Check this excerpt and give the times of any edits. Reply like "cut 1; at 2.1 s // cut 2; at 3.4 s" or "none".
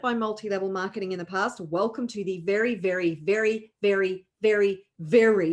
none